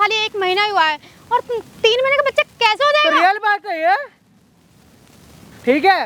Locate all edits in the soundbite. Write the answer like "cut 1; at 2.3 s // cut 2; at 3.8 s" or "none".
none